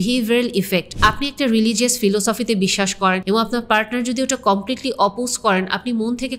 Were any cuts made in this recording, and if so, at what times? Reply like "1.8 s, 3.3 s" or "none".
0.9 s, 3.2 s